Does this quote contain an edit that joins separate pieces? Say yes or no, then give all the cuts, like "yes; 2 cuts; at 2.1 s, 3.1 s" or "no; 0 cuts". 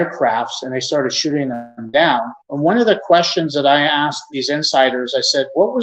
yes; 2 cuts; at 2.4 s, 4.2 s